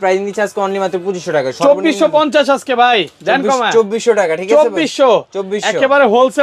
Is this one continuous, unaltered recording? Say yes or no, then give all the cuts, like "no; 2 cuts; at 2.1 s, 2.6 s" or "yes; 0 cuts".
yes; 0 cuts